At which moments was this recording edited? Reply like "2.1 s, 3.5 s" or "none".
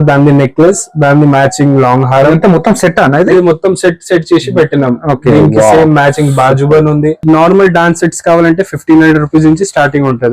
7.2 s

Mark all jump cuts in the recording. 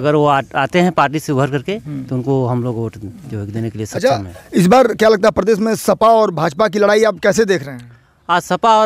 none

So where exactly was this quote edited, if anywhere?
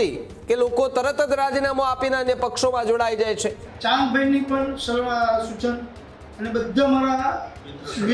3.7 s

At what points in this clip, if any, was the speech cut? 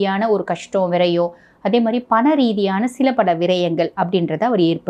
none

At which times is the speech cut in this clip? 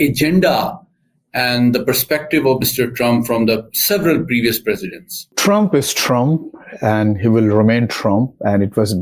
5.3 s

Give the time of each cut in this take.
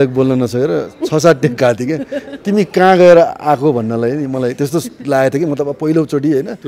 none

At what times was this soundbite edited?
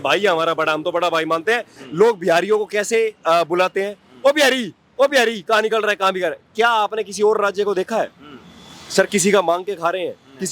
1.8 s

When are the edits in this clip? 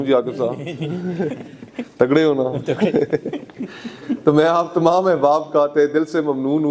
none

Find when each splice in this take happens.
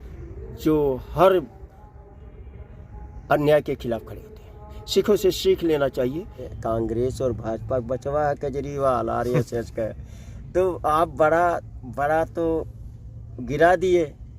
6.5 s

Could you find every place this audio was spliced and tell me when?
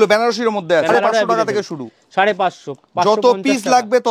0.9 s

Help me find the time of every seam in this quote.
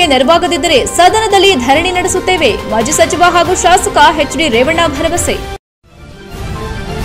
5.6 s

